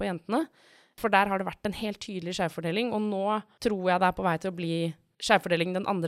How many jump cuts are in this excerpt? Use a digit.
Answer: 3